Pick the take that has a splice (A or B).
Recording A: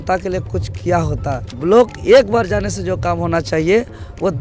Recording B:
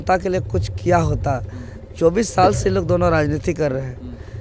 A